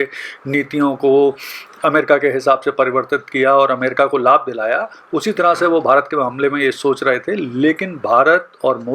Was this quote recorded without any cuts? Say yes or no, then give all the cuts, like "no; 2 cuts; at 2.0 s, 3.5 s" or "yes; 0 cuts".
yes; 0 cuts